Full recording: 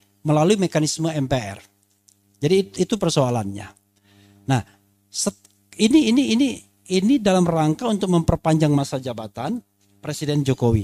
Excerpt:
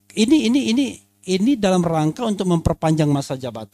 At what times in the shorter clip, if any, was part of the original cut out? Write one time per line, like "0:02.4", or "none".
none